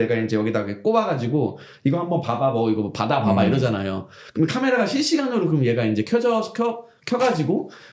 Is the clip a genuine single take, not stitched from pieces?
yes; 0 cuts

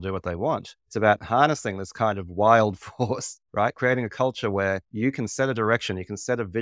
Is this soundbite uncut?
yes; 0 cuts

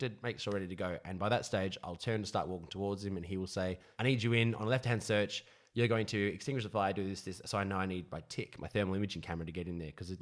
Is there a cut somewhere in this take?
yes; 1 cut; at 3.9 s

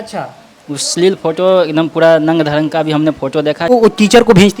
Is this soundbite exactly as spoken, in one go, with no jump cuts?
no; 1 cut; at 3.7 s

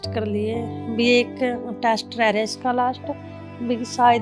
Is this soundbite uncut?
yes; 0 cuts

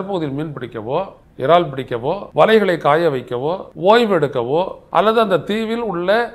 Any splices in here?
yes; 4 cuts; at 1.2 s, 2.2 s, 3.7 s, 4.8 s

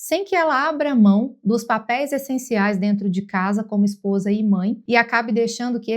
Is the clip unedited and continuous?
no; 1 cut; at 4.8 s

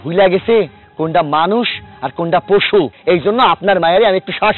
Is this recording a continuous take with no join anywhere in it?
no; 1 cut; at 2.9 s

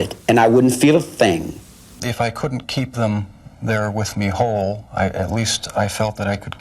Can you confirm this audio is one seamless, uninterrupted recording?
no; 1 cut; at 1.7 s

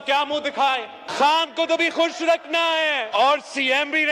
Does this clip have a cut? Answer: yes; 2 cuts; at 1.0 s, 3.1 s

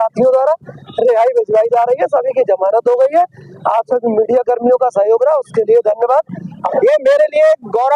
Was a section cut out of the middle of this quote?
yes; 1 cut; at 6.7 s

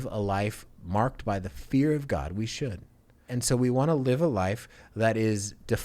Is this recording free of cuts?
no; 1 cut; at 3.3 s

